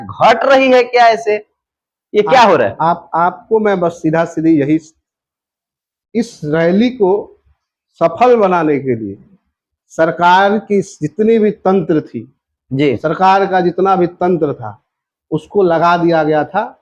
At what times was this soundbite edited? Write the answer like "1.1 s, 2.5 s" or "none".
none